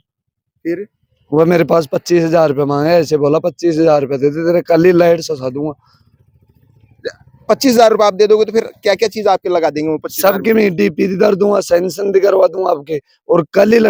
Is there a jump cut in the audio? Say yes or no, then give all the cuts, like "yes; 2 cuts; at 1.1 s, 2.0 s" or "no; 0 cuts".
no; 0 cuts